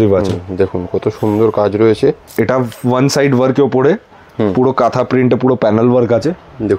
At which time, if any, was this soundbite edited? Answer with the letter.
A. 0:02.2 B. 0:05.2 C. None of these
A